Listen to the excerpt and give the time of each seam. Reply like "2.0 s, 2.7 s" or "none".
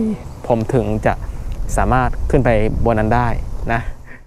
none

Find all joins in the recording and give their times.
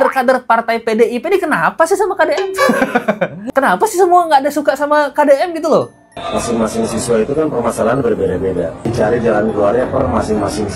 6.0 s, 8.8 s

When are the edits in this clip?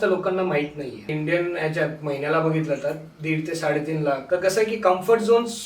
1.1 s, 4.2 s

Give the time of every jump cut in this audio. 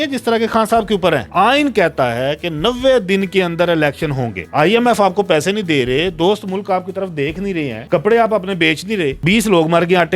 1.3 s, 4.4 s, 7.8 s

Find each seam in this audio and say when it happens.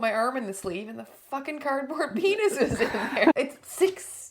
3.3 s

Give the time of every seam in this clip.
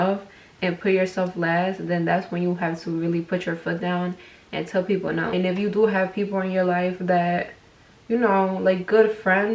5.3 s

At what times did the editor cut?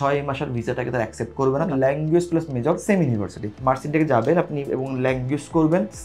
1.7 s, 3.5 s

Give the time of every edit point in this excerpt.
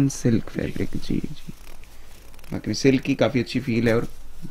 none

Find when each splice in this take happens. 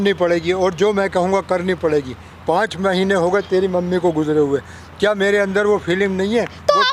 none

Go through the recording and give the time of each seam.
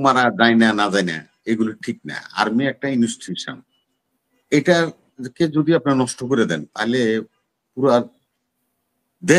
none

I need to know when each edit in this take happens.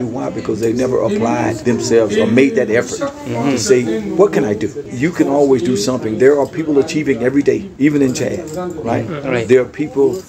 1.6 s, 4.8 s, 7.7 s

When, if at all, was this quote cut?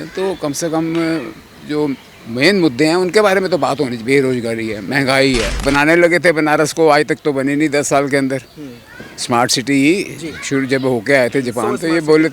5.5 s

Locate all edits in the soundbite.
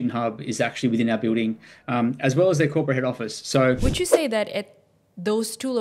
3.8 s

